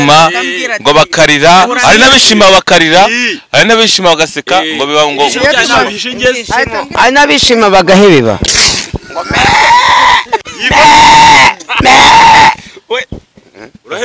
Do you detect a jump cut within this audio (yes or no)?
no